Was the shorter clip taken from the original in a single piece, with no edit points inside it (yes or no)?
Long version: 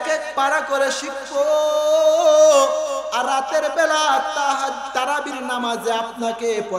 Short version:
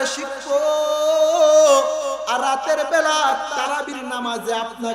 no